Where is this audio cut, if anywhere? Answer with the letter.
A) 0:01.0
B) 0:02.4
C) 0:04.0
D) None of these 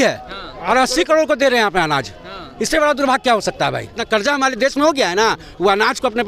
C